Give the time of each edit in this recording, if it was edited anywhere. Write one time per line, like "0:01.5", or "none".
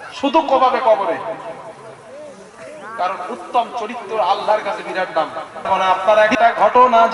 0:05.7

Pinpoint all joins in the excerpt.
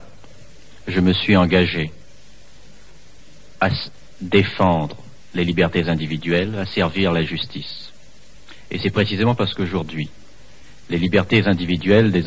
0:09.8

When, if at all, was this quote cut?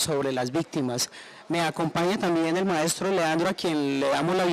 0:02.5

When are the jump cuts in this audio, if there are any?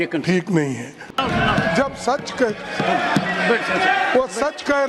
0:01.1

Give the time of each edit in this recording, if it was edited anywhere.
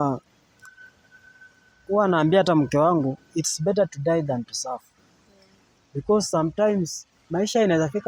none

